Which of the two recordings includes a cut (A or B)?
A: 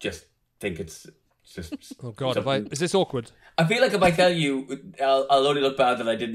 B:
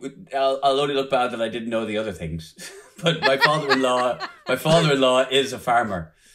A